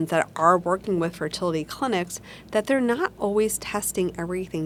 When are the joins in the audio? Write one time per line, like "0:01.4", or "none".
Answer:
none